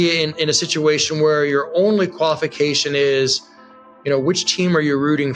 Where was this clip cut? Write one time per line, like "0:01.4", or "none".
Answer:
none